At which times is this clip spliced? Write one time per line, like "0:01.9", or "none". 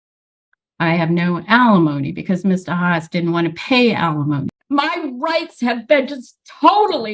0:04.5